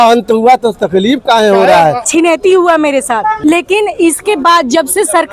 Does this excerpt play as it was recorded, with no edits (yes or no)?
no